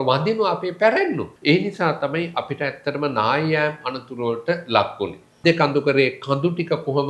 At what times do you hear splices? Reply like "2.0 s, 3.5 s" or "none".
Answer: 1.3 s, 5.4 s